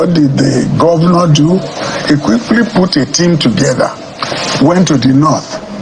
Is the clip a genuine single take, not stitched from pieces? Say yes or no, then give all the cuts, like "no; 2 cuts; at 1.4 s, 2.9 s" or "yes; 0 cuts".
yes; 0 cuts